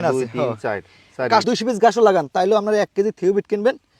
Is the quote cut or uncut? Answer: cut